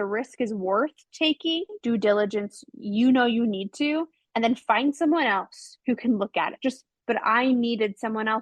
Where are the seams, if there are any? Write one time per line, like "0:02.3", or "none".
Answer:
0:01.8
0:06.9